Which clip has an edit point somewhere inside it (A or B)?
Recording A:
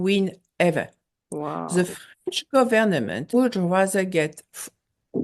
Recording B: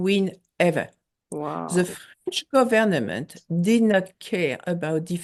A